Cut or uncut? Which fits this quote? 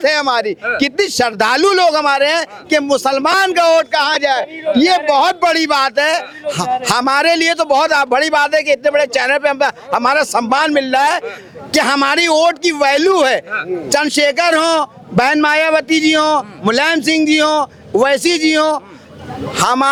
uncut